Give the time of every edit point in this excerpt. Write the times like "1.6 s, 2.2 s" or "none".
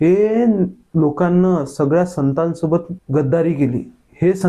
3.0 s